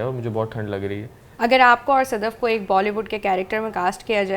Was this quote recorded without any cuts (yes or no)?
no